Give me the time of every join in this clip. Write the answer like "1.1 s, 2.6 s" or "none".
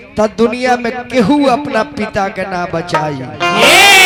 none